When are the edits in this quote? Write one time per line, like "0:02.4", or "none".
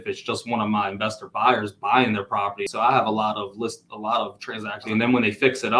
0:02.6
0:04.9